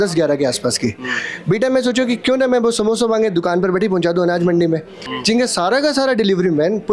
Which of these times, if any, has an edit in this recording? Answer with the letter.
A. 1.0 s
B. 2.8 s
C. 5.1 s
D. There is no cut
C